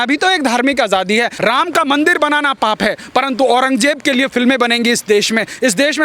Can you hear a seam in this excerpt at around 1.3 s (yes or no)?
yes